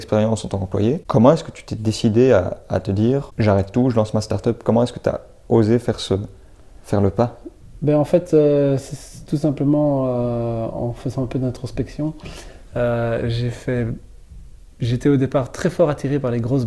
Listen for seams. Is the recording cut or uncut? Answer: cut